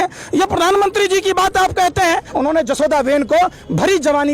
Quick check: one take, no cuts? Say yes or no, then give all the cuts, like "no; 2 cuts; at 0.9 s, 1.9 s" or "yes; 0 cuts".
no; 1 cut; at 2.3 s